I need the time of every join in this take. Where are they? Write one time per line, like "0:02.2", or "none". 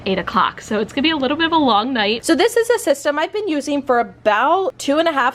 0:02.2